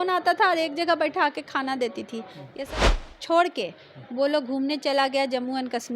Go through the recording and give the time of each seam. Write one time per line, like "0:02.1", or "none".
0:02.9

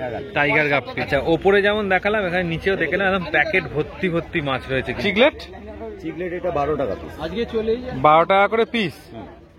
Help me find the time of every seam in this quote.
0:01.0
0:05.0

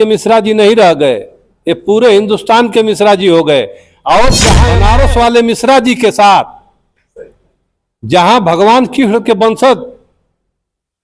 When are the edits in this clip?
0:04.5

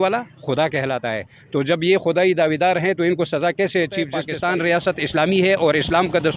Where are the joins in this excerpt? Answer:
0:04.2

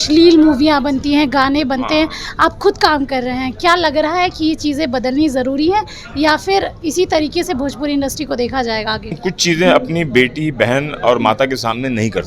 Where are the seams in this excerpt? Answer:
0:09.2

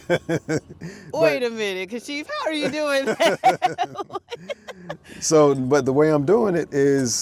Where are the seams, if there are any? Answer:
none

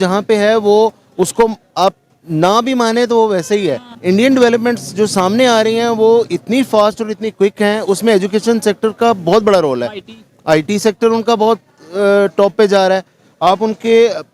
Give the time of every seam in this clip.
0:03.9

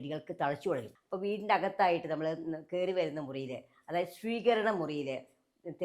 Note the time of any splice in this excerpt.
0:00.9

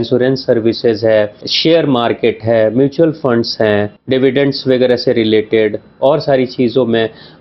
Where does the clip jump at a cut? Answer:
0:01.4
0:04.0

